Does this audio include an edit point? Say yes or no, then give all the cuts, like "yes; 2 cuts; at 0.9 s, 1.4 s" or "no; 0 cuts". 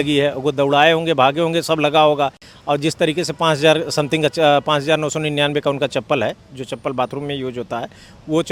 no; 0 cuts